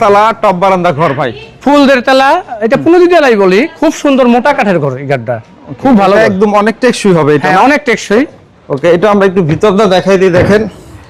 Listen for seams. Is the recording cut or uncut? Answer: uncut